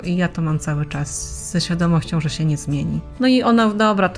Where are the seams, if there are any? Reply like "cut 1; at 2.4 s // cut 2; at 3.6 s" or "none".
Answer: cut 1; at 3.0 s